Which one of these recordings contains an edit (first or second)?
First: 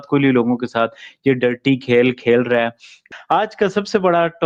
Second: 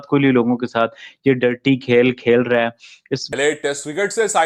second